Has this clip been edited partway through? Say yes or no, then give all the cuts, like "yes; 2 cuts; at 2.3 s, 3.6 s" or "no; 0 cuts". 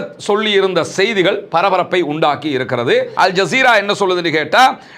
yes; 1 cut; at 3.1 s